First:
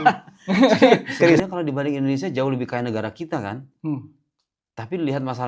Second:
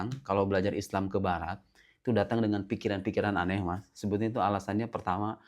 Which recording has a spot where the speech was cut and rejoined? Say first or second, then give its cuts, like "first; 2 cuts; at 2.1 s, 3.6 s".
first; 1 cut; at 1.4 s